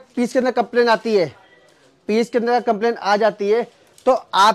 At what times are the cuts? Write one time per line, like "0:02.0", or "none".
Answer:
none